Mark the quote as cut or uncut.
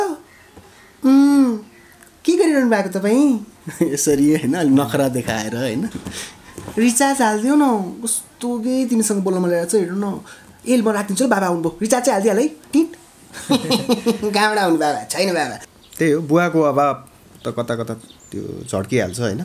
cut